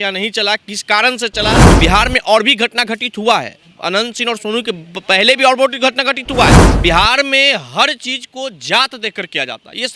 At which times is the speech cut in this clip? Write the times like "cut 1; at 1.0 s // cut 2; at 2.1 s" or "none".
cut 1; at 1.6 s // cut 2; at 6.7 s

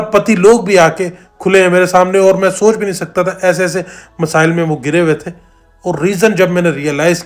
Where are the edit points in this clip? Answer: none

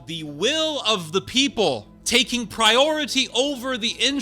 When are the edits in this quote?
cut 1; at 1.9 s

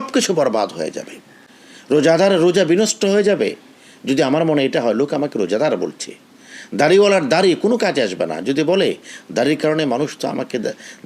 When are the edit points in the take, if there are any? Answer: none

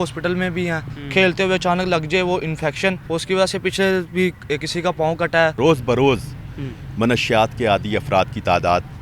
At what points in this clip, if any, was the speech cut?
cut 1; at 0.9 s // cut 2; at 3.0 s // cut 3; at 5.6 s

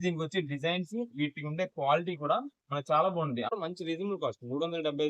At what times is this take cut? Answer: cut 1; at 3.5 s

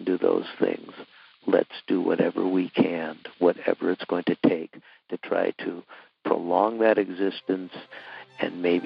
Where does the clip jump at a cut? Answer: none

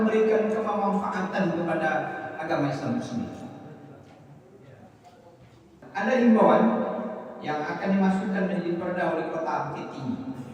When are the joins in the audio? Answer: cut 1; at 5.7 s

